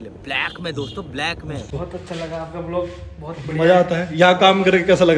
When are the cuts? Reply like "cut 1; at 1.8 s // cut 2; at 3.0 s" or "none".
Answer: cut 1; at 1.7 s